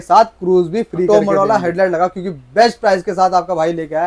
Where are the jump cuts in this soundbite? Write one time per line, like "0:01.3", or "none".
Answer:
0:01.1

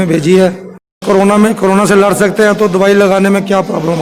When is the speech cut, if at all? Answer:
0:01.0

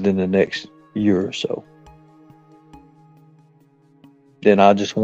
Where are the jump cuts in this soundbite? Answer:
0:02.0
0:03.7

